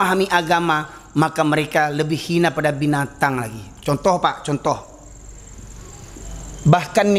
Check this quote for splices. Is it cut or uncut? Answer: uncut